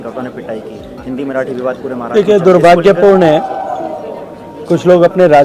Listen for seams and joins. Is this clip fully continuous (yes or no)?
yes